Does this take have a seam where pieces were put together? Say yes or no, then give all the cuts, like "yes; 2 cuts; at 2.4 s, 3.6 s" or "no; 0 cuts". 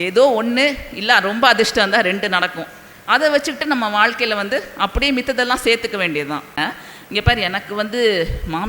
yes; 1 cut; at 6.6 s